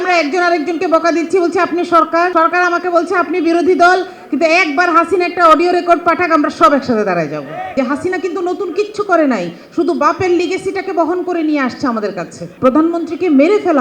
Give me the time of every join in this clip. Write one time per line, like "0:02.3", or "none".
0:02.3
0:07.8
0:12.5